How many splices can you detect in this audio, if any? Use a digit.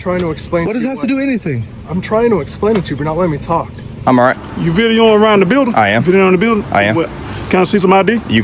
1